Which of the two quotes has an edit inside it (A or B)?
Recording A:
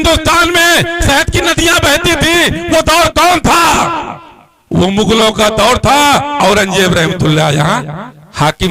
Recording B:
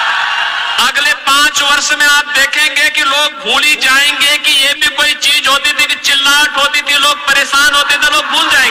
A